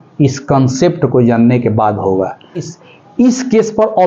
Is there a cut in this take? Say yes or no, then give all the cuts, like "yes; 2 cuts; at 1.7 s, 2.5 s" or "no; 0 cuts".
yes; 1 cut; at 2.7 s